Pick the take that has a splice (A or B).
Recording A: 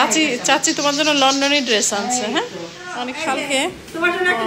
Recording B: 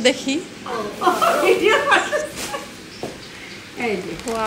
A